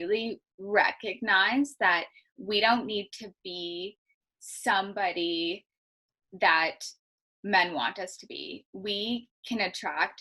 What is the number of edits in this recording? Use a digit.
0